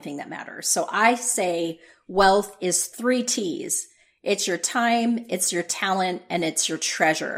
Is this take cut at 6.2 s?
no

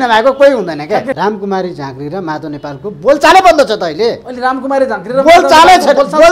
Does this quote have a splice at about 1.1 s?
yes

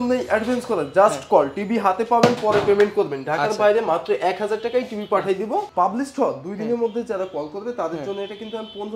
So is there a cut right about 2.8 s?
no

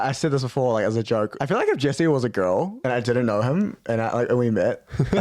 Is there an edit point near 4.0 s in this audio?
no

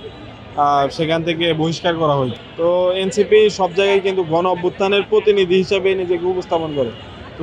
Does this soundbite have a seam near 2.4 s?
yes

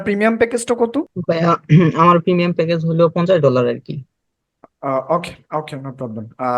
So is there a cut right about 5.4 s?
no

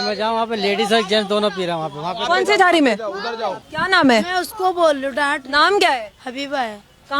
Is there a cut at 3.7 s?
yes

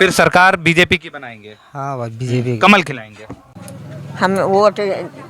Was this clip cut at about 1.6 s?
no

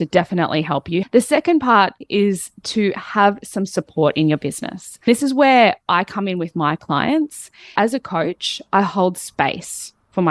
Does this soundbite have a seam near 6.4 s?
no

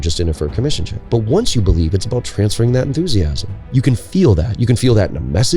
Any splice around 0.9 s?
yes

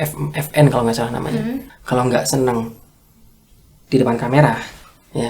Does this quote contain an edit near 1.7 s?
yes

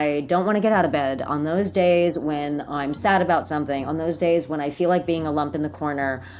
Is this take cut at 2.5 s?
no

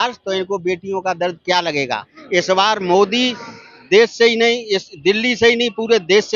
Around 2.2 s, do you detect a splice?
yes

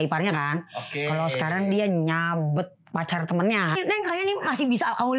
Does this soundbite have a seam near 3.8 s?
yes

